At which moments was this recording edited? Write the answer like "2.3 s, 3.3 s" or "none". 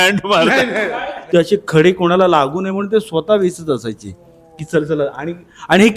1.1 s